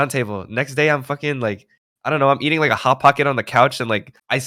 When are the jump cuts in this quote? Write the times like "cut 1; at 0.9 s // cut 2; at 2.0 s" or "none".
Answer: none